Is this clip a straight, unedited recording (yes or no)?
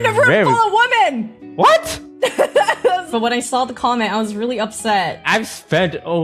no